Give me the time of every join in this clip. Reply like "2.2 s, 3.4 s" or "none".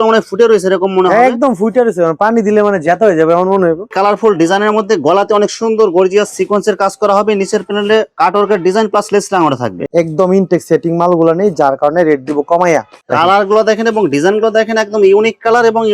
3.8 s, 9.8 s, 13.0 s